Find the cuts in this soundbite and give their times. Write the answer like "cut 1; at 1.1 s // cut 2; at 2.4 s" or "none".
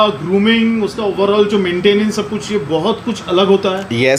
none